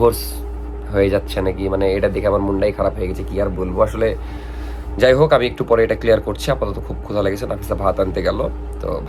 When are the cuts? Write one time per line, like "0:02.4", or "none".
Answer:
none